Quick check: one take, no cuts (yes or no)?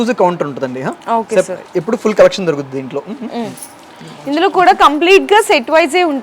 yes